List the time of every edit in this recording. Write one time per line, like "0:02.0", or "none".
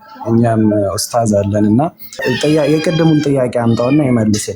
0:02.3